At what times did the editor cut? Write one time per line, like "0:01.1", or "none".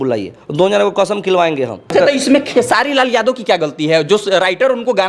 0:01.9